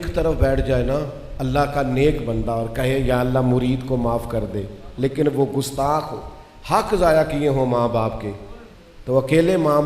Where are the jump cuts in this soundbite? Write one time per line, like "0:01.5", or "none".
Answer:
0:01.2